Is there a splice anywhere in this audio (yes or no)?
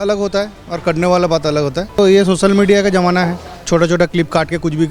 yes